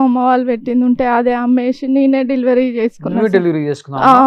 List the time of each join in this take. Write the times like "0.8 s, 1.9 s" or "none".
none